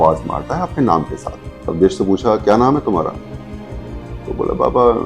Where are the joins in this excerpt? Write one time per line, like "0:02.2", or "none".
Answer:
0:01.6